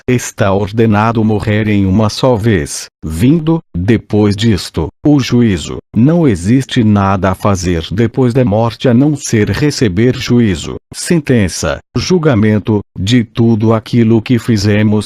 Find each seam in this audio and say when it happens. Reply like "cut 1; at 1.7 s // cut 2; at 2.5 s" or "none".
none